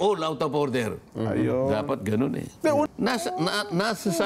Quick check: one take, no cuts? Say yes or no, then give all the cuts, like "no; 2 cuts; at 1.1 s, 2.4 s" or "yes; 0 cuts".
no; 1 cut; at 2.9 s